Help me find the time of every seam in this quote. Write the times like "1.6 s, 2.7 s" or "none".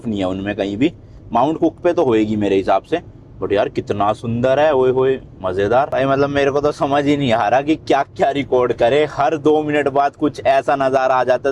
5.9 s